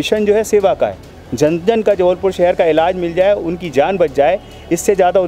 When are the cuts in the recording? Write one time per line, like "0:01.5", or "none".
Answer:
none